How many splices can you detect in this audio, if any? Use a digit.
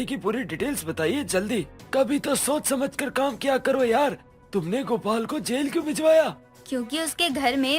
1